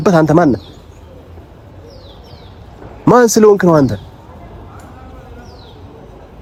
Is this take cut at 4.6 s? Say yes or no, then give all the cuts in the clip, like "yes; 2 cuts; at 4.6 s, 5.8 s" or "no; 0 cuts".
no; 0 cuts